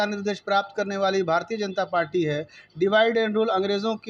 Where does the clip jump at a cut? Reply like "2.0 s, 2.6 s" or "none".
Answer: none

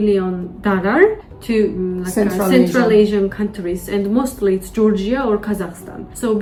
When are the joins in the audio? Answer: none

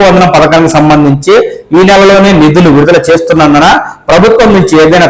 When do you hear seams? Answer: none

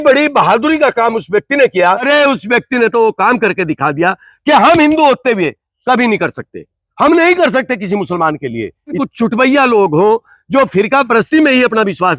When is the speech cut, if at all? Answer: 2.0 s, 9.0 s

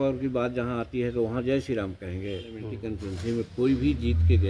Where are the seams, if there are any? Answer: 2.7 s

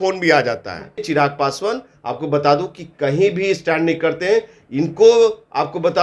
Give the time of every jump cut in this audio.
1.1 s

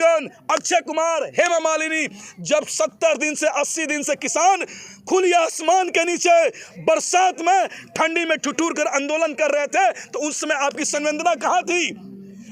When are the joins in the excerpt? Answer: none

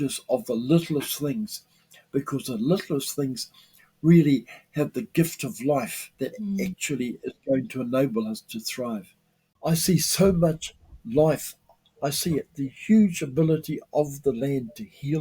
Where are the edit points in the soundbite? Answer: 9.5 s

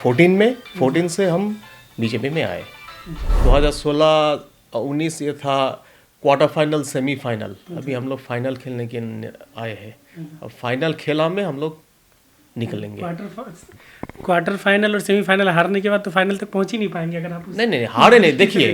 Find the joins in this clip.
3.4 s

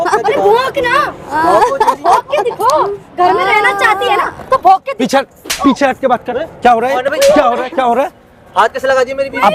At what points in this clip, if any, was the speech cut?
none

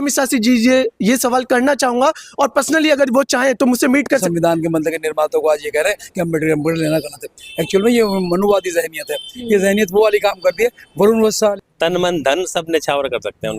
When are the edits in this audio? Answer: 4.3 s, 11.5 s

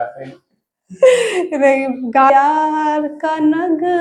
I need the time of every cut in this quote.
2.3 s

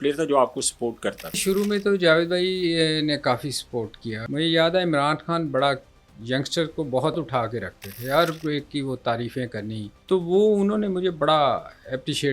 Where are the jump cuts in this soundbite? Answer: 1.4 s, 4.2 s, 7.3 s, 9.9 s

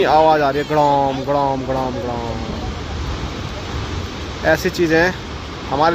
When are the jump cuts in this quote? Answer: none

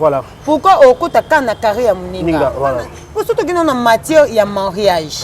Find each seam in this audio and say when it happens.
3.0 s

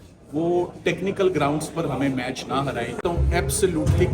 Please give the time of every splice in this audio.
3.0 s

